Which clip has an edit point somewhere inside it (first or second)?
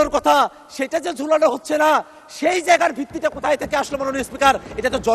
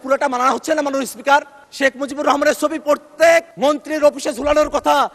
second